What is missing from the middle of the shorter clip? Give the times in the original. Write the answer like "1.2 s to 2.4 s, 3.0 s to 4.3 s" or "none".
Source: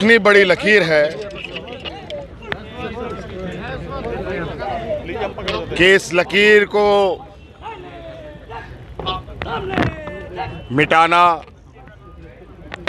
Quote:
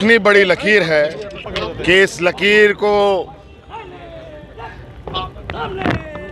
1.5 s to 5.4 s